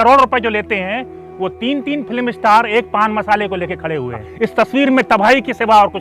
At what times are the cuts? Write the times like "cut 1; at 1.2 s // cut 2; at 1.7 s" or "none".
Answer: cut 1; at 4.2 s